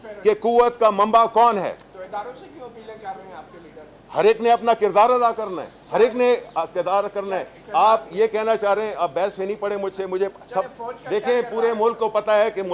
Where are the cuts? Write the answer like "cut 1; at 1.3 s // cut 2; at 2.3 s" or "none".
none